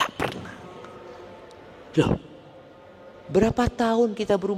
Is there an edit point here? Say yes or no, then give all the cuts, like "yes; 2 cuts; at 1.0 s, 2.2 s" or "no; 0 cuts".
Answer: no; 0 cuts